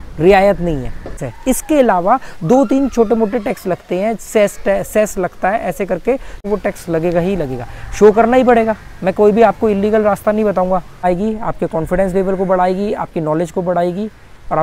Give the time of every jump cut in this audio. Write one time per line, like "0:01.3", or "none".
0:01.3
0:06.4
0:11.0